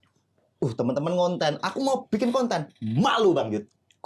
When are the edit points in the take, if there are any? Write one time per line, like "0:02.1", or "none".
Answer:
none